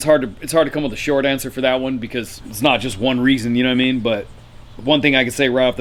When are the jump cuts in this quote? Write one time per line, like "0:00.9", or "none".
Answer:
none